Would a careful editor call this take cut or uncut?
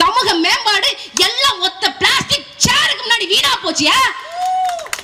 uncut